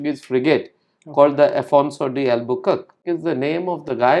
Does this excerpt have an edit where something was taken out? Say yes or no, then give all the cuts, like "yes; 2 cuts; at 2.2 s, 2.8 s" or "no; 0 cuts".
yes; 1 cut; at 3.0 s